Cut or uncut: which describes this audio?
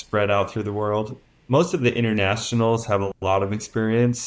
cut